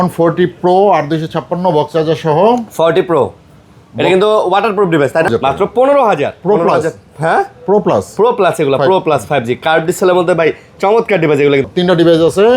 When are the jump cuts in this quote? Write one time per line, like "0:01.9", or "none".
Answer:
0:05.3
0:11.6